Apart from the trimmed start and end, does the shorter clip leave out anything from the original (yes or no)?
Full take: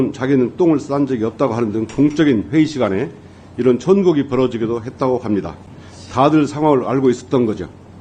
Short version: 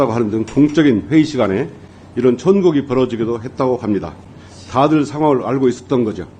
no